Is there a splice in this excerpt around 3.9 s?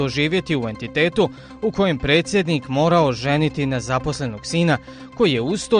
yes; 1 cut; at 3.9 s

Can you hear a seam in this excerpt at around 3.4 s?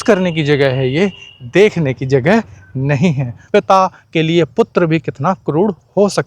yes; 1 cut; at 3.4 s

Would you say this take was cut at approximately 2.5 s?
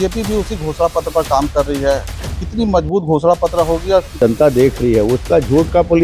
no; 1 cut; at 4.2 s

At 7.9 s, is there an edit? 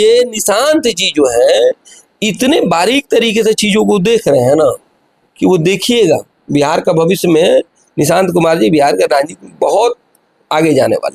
no; 0 cuts

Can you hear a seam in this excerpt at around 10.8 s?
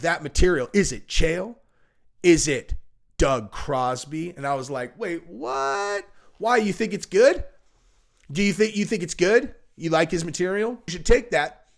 yes; 1 cut; at 10.8 s

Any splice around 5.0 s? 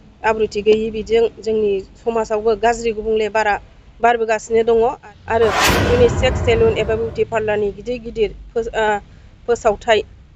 yes; 1 cut; at 5.0 s

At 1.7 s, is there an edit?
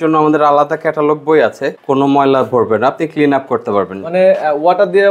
yes; 1 cut; at 1.7 s

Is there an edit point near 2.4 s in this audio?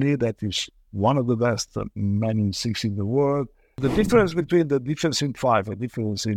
no; 1 cut; at 3.8 s

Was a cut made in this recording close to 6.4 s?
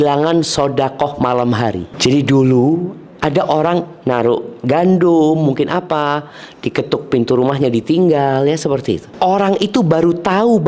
no; 2 cuts; at 1.9 s, 9.1 s

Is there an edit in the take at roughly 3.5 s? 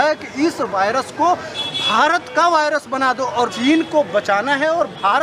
yes; 1 cut; at 3.5 s

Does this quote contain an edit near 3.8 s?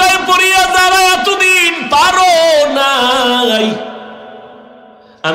no; 0 cuts

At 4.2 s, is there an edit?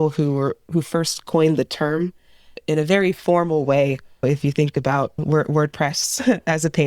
yes; 2 cuts; at 2.5 s, 4.2 s

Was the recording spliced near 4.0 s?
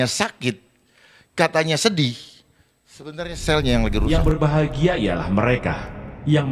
yes; 1 cut; at 4.0 s

